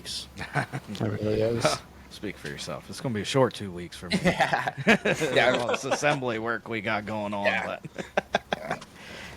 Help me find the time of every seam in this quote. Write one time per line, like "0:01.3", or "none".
none